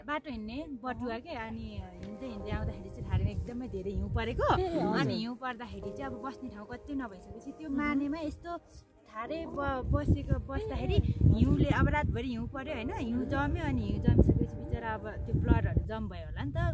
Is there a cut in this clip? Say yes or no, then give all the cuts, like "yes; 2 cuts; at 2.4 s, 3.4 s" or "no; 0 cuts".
no; 0 cuts